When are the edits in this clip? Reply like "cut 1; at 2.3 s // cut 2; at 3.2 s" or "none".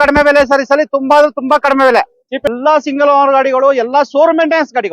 cut 1; at 2.5 s